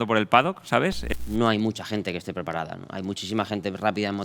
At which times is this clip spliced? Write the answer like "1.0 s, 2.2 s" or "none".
1.0 s